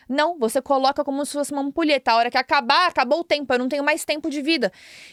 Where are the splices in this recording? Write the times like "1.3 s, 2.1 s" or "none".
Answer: none